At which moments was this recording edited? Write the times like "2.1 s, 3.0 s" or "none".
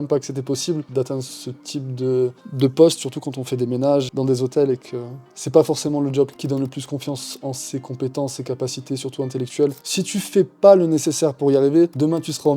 0.8 s, 4.1 s, 6.4 s, 9.8 s